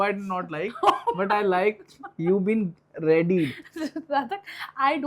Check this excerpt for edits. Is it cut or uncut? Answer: uncut